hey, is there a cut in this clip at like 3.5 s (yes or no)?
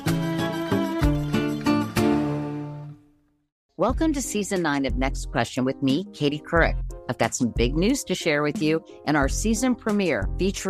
yes